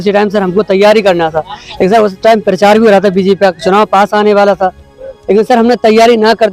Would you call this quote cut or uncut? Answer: uncut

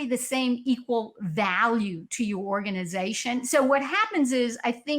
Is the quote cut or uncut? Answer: cut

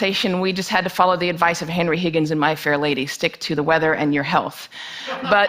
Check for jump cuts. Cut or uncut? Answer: cut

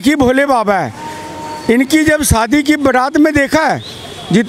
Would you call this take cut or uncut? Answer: uncut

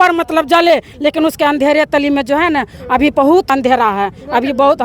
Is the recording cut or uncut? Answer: cut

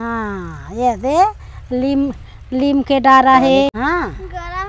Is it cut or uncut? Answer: cut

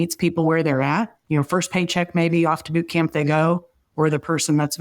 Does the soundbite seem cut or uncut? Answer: cut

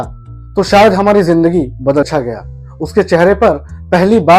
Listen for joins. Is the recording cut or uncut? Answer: cut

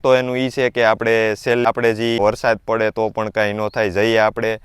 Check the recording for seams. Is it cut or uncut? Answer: cut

